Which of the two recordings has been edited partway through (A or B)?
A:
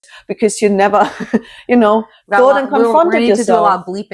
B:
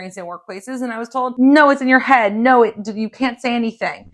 B